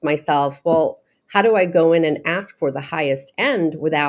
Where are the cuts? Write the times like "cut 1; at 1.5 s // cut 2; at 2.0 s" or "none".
none